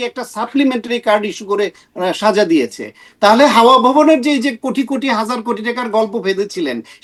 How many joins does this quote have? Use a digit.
0